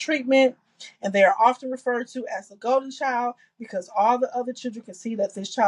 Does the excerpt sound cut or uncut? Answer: uncut